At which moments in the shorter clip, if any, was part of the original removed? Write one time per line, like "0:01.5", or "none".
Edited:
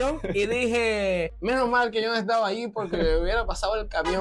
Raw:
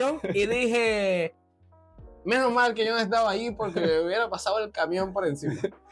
0:01.3

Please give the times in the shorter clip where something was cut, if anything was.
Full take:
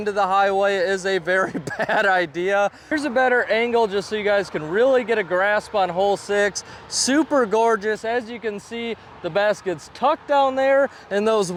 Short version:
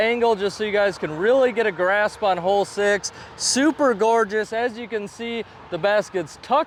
none

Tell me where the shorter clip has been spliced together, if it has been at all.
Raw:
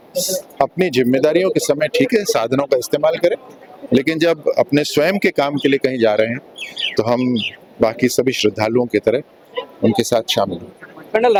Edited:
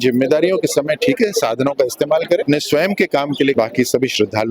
0:02.4
0:03.5

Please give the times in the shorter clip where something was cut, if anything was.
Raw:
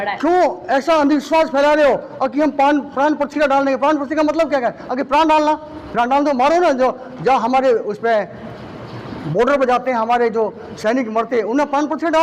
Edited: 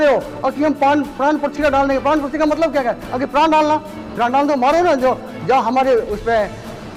none

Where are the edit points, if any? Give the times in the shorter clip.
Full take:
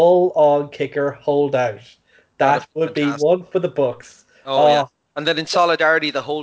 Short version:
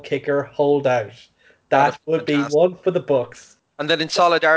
0:03.6

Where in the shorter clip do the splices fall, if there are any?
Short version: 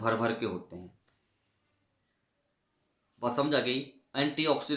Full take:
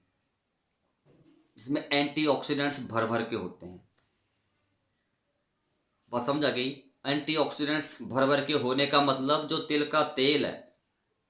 none

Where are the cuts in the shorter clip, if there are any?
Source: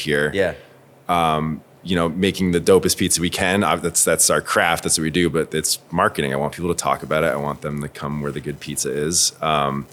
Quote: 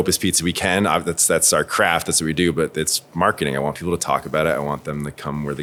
none

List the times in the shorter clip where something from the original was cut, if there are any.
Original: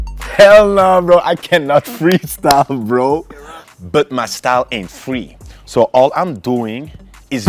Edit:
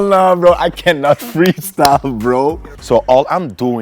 0:02.7

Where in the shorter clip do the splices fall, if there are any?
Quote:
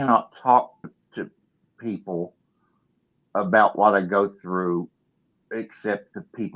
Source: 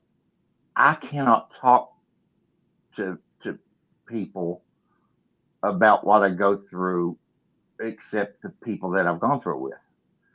0:01.0

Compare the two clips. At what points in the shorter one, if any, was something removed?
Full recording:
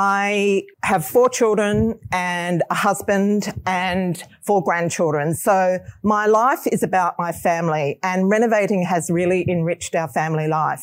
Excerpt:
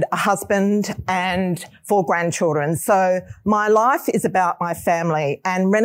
none

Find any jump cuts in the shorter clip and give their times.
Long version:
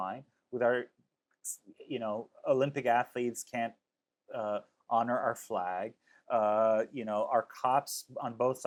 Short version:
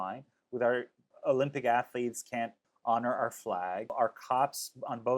0:01.1
0:02.7
0:03.9

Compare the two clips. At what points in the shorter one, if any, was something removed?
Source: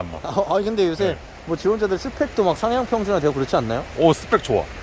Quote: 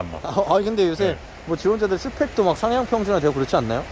none

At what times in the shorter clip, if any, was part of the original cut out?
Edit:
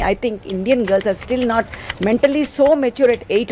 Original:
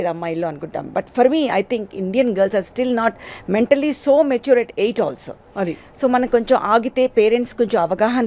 none

